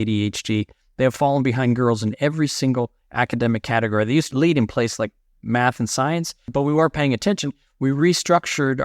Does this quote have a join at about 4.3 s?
yes; 2 cuts; at 4.3 s, 6.5 s

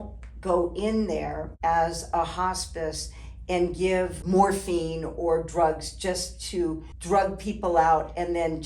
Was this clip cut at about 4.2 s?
yes; 3 cuts; at 1.4 s, 4.2 s, 6.9 s

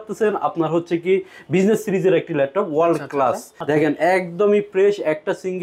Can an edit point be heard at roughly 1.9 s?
no; 1 cut; at 3.5 s

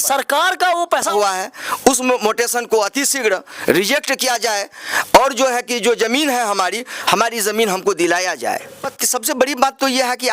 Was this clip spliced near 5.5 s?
no; 2 cuts; at 1.1 s, 8.8 s

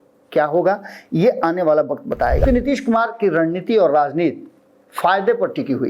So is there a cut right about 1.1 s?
no; 1 cut; at 2.4 s

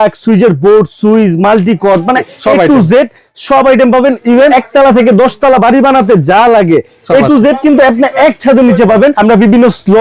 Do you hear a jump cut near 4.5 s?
yes; 3 cuts; at 2.3 s, 4.5 s, 9.2 s

